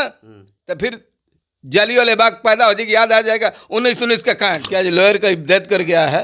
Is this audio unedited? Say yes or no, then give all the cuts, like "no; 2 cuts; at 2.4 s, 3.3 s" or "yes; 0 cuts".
no; 1 cut; at 4.6 s